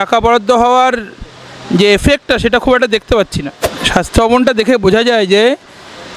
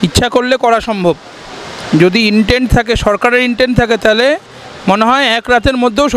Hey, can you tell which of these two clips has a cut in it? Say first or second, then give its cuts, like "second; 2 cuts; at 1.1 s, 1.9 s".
first; 1 cut; at 3.7 s